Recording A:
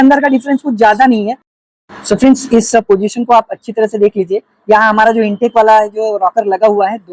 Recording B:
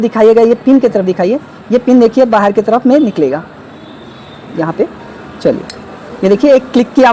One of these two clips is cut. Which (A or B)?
A